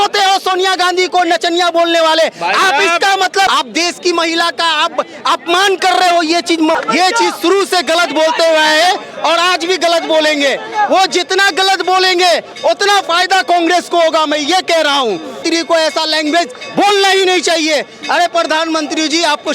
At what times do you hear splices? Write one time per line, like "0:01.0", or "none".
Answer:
0:03.5
0:06.8
0:15.4